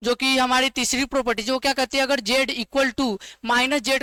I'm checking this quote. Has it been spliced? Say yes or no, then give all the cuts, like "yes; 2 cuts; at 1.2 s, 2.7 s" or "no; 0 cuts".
no; 0 cuts